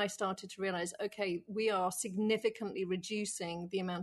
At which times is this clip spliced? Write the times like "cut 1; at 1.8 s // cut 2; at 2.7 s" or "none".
none